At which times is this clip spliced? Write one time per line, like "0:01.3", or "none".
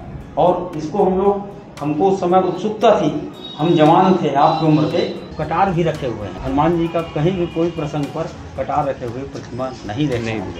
0:05.3
0:06.3